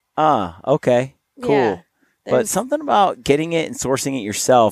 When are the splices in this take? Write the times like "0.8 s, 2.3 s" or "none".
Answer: none